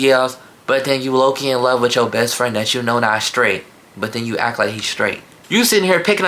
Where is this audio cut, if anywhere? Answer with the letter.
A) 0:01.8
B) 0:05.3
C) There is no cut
B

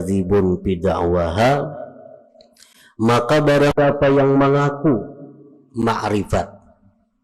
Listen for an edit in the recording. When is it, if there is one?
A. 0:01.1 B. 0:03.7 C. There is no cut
B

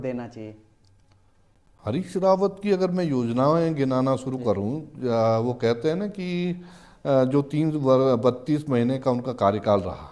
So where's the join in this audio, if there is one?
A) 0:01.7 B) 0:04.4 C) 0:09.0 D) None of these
D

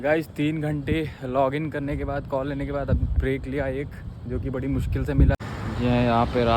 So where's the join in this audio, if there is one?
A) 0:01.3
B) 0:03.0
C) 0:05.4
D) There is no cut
C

